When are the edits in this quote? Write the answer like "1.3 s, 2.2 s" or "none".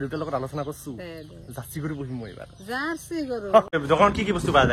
3.7 s